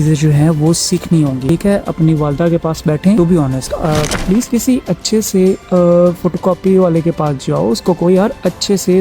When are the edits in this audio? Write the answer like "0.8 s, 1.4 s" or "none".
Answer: 4.2 s